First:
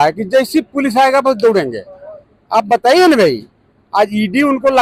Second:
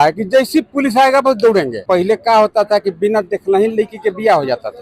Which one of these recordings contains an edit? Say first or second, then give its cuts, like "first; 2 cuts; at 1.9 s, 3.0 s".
second; 1 cut; at 1.8 s